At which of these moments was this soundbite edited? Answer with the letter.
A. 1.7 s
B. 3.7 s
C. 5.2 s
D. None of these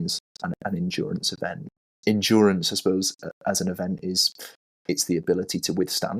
A